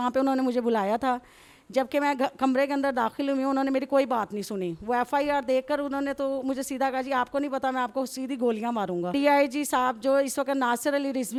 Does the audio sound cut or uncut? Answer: uncut